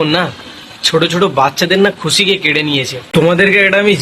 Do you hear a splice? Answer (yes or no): yes